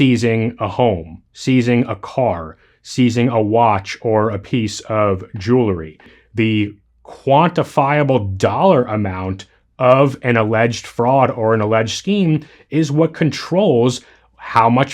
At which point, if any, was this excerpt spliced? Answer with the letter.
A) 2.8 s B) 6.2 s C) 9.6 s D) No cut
B